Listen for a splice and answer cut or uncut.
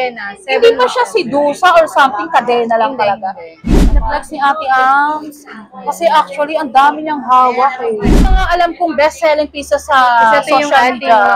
cut